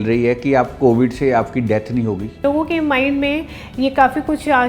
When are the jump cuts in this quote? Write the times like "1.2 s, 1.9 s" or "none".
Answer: 2.4 s